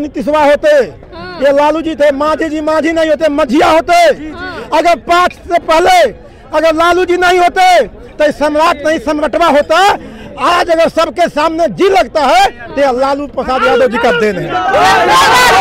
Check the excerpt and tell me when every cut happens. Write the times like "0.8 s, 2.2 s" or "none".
none